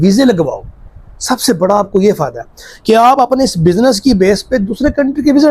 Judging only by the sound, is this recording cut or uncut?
uncut